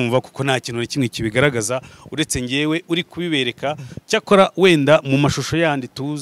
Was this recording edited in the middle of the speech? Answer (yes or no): no